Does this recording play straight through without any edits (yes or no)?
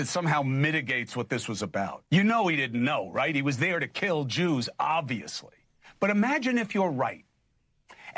no